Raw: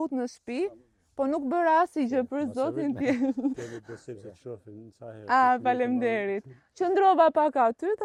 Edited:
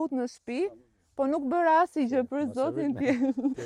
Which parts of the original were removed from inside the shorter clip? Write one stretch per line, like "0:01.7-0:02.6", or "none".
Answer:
none